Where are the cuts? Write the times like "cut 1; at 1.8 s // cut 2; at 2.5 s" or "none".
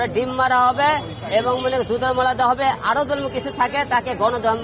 none